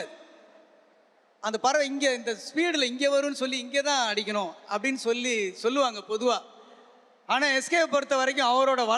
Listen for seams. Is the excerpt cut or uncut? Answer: uncut